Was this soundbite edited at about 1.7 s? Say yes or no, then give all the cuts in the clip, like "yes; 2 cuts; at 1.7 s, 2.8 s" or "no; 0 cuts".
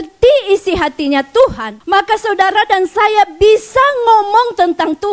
yes; 1 cut; at 1.7 s